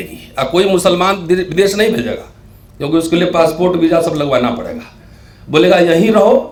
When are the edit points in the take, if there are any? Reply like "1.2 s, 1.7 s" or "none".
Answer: none